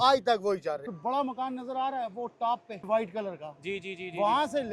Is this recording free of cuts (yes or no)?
no